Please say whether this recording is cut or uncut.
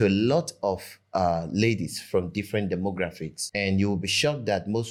uncut